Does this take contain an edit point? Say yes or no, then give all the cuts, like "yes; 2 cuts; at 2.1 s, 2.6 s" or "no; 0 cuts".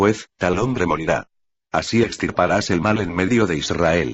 no; 0 cuts